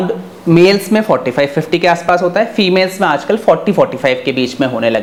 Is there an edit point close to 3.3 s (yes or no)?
no